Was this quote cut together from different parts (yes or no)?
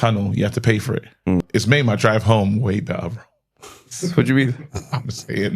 yes